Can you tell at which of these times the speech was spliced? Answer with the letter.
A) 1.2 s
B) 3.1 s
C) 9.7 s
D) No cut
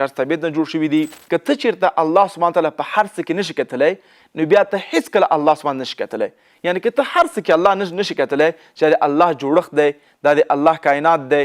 A